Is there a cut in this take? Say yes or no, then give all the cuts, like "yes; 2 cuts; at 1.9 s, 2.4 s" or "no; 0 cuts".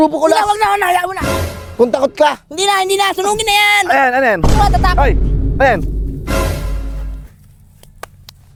no; 0 cuts